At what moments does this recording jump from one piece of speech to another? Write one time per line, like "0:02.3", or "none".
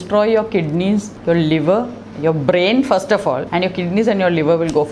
0:01.1
0:03.5